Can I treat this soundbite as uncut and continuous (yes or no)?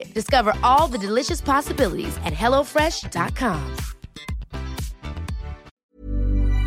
no